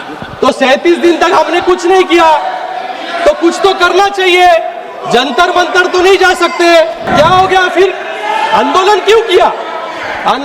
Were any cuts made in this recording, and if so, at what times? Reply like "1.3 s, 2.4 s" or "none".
7.1 s

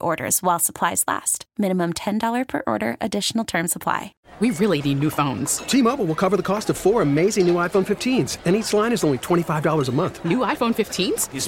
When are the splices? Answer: 4.2 s

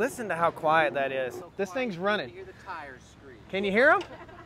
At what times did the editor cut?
1.4 s

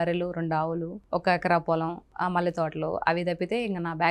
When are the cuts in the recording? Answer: 0.9 s, 2.0 s

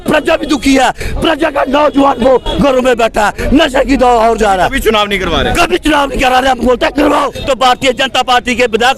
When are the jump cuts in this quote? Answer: 7.4 s

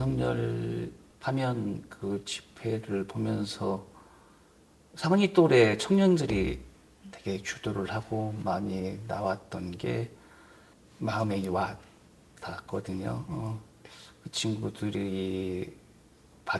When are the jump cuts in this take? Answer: 1.0 s

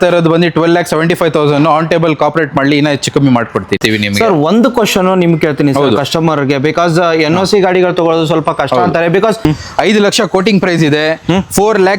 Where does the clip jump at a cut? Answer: 3.8 s, 9.4 s

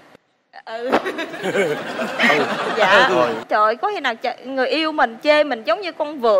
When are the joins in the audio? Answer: 3.4 s

